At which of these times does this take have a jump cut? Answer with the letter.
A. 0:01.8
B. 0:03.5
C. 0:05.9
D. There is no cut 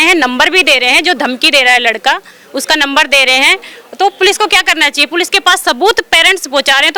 D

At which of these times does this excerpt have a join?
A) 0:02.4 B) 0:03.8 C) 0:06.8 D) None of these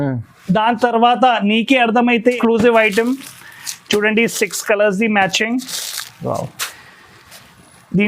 A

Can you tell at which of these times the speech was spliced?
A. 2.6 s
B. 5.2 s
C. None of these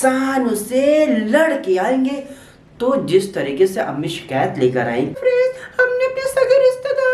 B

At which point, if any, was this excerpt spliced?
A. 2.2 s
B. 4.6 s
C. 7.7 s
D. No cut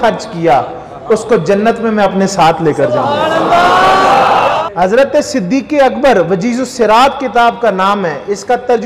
B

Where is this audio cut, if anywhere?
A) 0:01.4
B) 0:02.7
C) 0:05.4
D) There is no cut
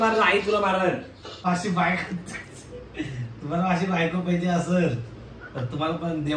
A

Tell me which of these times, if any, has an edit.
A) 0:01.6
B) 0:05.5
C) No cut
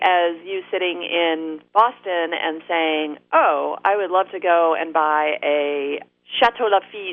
A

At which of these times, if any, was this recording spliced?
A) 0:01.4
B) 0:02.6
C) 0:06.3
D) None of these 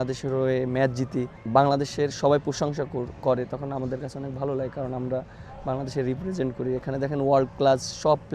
A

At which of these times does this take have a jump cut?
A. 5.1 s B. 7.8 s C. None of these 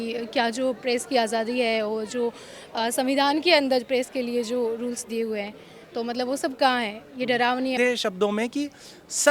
B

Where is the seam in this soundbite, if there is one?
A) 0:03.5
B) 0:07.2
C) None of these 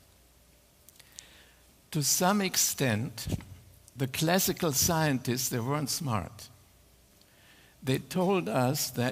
B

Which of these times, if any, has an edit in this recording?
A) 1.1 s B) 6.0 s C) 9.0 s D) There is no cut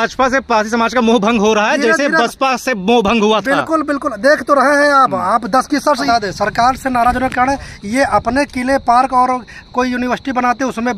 B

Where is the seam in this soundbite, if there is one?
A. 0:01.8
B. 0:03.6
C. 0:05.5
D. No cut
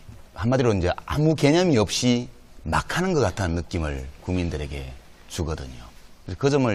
D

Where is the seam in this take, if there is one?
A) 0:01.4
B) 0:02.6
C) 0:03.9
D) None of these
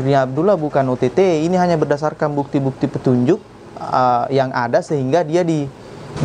D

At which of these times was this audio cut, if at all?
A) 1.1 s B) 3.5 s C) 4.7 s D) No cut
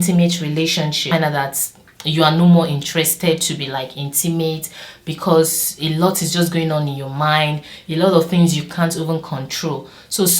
A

